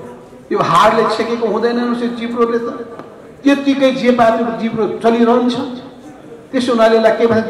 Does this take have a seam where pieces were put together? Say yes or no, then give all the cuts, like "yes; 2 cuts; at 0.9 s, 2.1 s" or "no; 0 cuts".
no; 0 cuts